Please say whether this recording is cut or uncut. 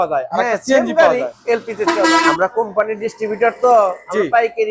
cut